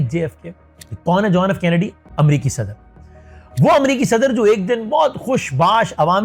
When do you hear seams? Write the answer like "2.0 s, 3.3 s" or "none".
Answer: none